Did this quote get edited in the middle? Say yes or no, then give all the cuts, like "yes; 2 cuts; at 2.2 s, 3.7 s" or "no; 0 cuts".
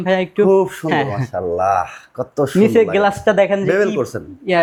no; 0 cuts